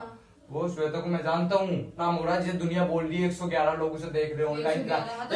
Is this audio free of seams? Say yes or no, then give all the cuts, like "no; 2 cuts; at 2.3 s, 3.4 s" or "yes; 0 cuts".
no; 1 cut; at 2.0 s